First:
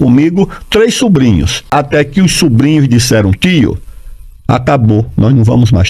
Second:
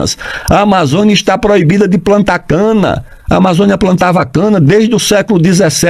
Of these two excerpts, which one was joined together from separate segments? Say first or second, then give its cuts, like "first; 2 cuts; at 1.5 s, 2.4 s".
first; 1 cut; at 1.6 s